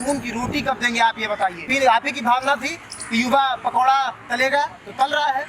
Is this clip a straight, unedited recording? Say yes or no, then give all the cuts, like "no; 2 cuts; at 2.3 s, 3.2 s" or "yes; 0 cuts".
no; 1 cut; at 1.7 s